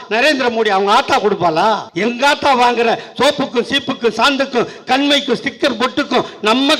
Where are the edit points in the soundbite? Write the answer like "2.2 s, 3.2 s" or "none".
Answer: 1.9 s